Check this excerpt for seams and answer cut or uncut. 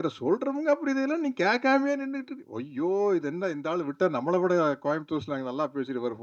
uncut